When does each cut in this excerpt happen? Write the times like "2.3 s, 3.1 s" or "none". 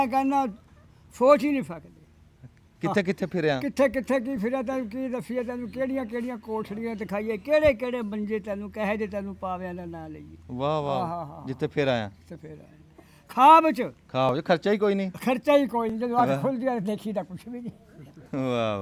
none